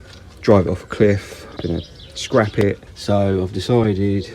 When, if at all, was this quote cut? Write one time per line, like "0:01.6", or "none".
0:01.5
0:02.9